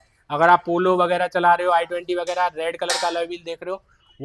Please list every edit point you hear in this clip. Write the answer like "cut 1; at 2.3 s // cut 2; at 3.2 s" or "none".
none